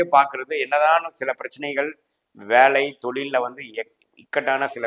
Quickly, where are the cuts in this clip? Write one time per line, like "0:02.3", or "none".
none